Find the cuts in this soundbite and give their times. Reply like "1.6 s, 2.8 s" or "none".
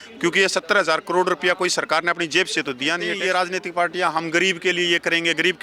3.1 s